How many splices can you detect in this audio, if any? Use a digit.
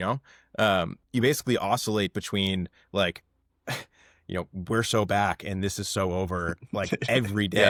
0